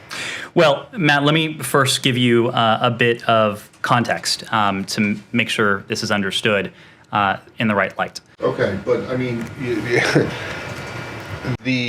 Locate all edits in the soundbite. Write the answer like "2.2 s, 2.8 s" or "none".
8.3 s